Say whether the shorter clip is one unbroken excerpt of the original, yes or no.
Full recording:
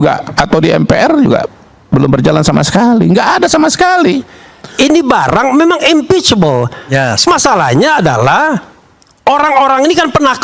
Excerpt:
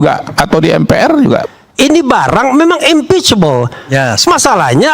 no